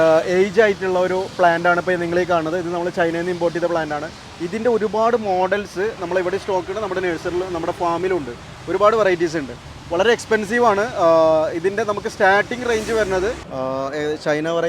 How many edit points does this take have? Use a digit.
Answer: 1